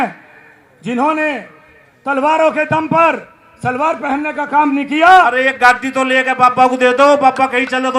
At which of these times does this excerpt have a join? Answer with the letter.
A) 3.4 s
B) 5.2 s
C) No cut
B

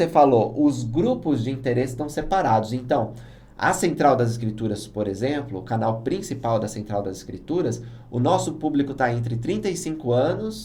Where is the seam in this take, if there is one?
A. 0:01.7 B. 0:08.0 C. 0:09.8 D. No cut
D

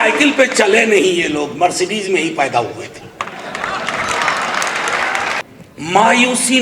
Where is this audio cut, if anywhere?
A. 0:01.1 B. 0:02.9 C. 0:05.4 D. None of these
C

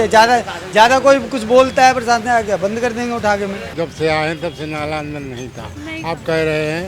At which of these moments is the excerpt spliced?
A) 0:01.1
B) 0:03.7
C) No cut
B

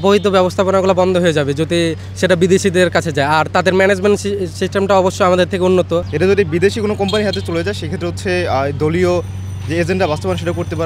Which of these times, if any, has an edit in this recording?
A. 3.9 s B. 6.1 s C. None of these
B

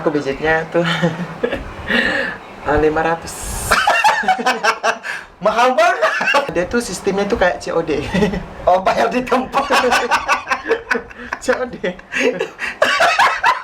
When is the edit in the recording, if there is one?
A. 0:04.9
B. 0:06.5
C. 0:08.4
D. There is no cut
B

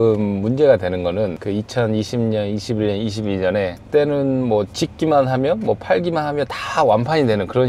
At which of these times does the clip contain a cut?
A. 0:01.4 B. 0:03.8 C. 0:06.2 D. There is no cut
A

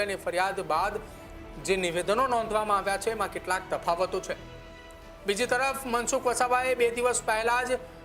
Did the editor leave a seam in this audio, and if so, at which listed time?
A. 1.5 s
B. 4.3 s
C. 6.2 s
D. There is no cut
D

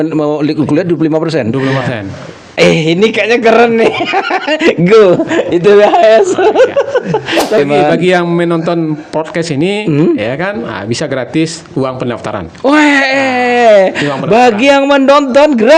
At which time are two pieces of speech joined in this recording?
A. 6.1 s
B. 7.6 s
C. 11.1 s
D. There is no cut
B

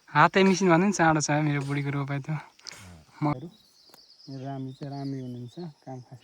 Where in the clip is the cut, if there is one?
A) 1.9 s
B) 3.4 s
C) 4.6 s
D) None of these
B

